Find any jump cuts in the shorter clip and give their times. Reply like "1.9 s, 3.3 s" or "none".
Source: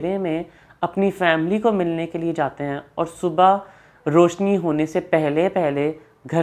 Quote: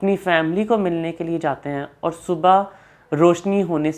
none